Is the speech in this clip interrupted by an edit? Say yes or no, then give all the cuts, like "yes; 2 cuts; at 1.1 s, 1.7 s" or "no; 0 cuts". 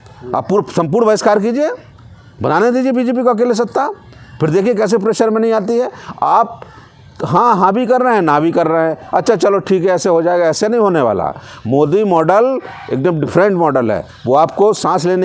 no; 0 cuts